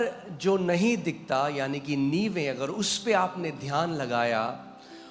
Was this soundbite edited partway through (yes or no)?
no